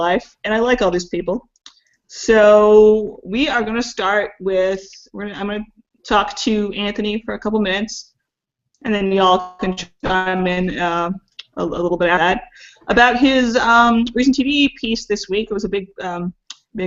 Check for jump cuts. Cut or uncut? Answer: uncut